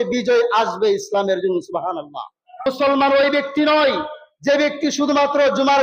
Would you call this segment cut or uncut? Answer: cut